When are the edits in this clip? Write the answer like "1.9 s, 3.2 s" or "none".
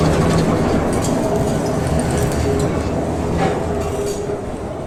none